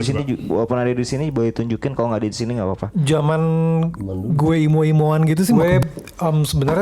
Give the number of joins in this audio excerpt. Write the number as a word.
one